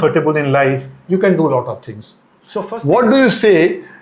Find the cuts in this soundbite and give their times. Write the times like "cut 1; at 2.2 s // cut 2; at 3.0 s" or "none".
cut 1; at 2.3 s